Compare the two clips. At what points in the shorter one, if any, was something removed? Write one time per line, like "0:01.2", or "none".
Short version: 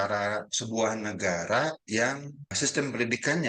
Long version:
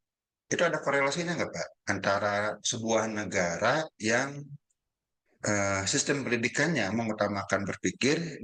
0:02.5